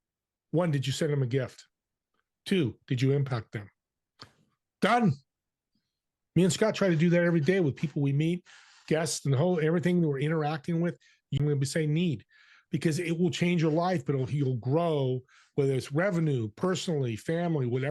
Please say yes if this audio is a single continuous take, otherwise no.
no